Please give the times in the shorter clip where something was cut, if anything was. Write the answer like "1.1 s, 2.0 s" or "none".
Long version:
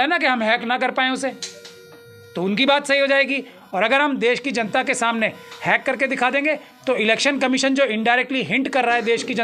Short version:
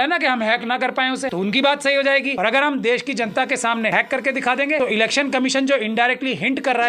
1.3 s, 2.3 s, 3.9 s, 4.8 s